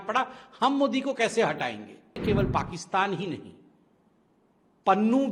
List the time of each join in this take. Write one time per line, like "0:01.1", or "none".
0:02.2